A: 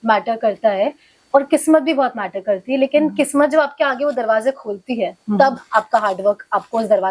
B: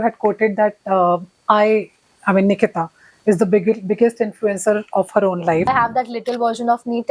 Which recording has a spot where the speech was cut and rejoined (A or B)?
B